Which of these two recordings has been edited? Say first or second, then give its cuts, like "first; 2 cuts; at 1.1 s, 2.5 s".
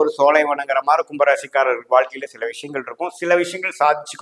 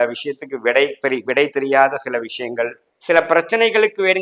second; 1 cut; at 2.9 s